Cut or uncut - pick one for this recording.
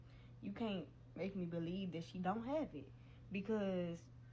uncut